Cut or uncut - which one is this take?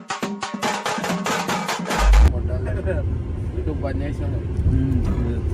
uncut